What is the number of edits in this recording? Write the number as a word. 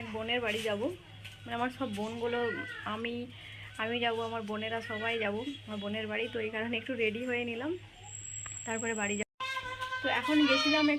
one